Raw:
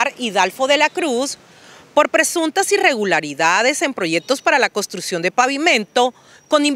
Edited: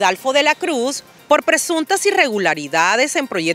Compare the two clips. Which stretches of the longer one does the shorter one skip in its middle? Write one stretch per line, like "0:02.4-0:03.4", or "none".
0:01.4-0:01.7